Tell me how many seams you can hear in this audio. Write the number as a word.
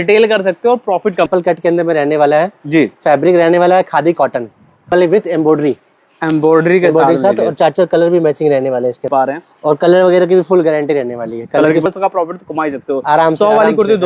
four